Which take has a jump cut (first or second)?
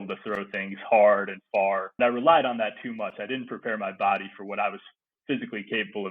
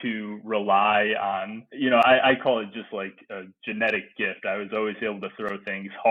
first